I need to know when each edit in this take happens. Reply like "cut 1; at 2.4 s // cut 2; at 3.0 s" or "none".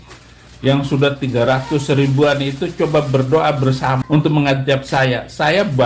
cut 1; at 4.0 s